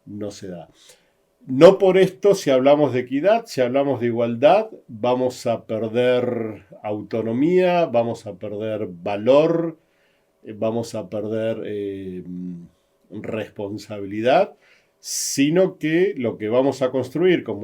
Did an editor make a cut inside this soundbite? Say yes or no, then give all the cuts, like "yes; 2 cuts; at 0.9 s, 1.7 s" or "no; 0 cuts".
no; 0 cuts